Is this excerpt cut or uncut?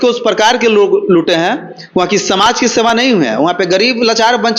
uncut